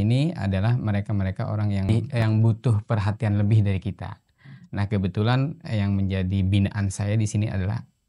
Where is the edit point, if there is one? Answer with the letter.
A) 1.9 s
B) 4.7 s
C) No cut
A